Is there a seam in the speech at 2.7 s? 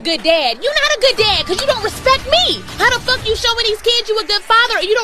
yes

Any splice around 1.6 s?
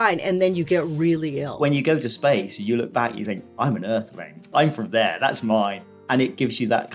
yes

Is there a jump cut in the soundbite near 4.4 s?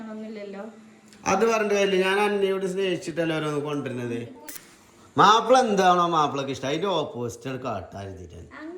yes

